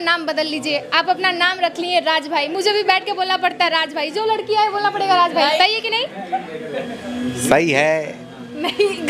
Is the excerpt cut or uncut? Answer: uncut